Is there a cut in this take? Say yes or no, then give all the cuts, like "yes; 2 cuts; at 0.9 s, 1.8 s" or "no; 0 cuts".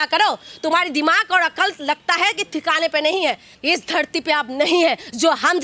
yes; 1 cut; at 3.5 s